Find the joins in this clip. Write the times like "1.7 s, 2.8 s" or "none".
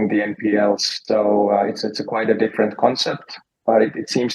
0.9 s

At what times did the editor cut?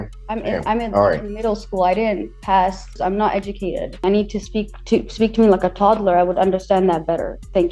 2.9 s, 4.0 s

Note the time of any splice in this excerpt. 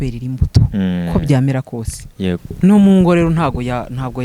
2.5 s

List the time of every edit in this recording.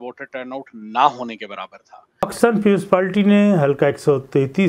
2.3 s

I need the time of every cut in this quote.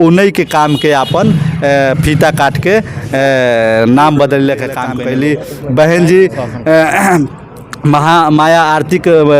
4.9 s

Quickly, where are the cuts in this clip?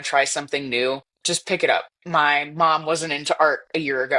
1.1 s, 2.0 s

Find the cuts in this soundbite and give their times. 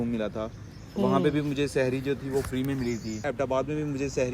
3.3 s

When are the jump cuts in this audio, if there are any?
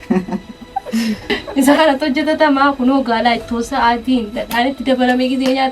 1.4 s

